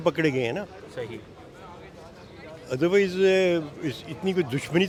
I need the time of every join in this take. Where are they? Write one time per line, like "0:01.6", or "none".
none